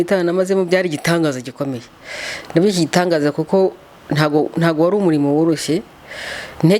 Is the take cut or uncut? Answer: uncut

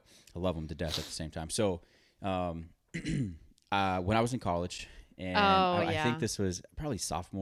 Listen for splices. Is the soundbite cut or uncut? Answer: uncut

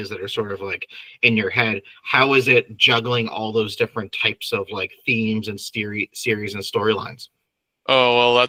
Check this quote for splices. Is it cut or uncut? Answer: uncut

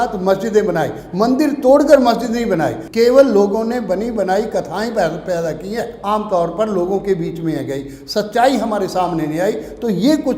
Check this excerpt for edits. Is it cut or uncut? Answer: cut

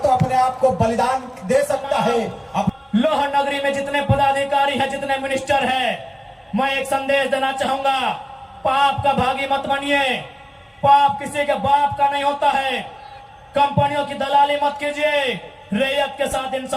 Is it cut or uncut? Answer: cut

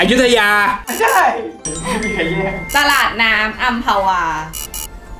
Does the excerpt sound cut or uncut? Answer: uncut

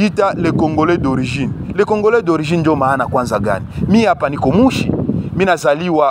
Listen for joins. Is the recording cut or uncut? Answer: uncut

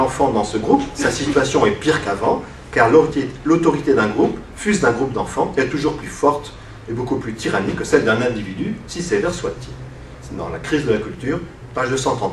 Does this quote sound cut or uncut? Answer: cut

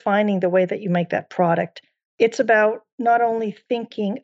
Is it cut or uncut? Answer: cut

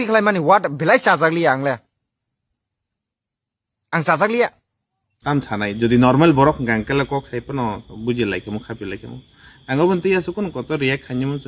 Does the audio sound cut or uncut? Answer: cut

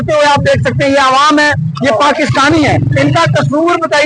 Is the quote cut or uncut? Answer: uncut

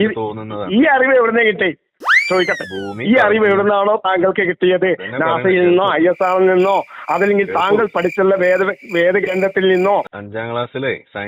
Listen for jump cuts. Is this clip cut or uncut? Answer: cut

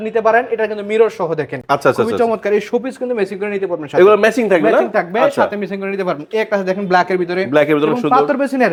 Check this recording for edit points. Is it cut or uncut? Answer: uncut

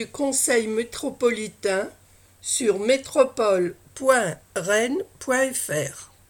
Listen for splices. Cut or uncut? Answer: uncut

